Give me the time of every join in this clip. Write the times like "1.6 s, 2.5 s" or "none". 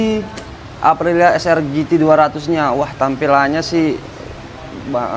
none